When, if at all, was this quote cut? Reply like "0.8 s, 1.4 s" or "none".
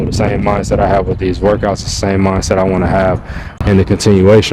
3.5 s